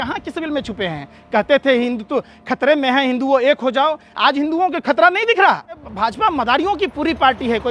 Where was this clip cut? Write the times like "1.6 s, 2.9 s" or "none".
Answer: 5.9 s